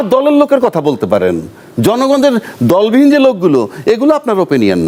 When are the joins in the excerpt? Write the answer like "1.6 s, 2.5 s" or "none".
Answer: none